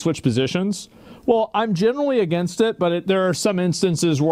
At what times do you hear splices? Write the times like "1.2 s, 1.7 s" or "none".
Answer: none